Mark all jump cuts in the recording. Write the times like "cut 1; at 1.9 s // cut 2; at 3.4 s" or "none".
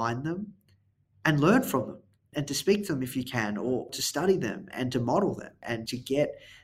cut 1; at 2.3 s // cut 2; at 3.9 s // cut 3; at 4.6 s // cut 4; at 5.7 s

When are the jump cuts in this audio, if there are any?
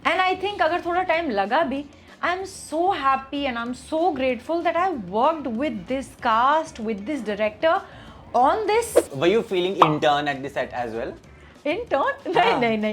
cut 1; at 9.0 s

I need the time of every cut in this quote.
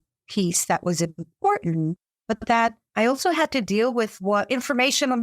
cut 1; at 2.5 s

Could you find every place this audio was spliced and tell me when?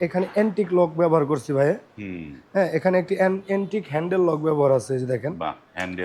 none

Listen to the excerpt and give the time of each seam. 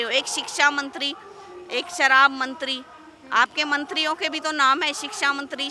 none

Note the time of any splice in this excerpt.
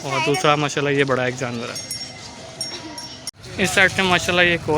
cut 1; at 3.4 s

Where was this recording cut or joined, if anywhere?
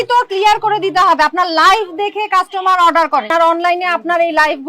cut 1; at 3.3 s

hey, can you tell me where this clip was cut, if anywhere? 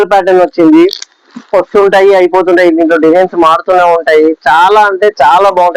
none

